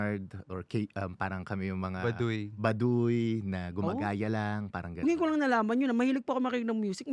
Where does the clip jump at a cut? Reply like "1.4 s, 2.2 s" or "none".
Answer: none

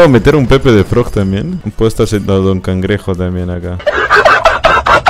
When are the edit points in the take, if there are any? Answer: none

